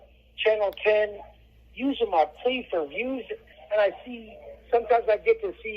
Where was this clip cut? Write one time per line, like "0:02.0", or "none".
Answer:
0:03.5